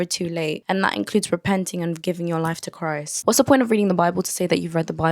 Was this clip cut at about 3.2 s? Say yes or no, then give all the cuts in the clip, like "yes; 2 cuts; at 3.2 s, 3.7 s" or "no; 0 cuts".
yes; 1 cut; at 3.2 s